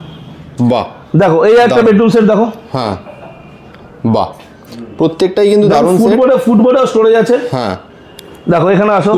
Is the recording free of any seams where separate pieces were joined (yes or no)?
yes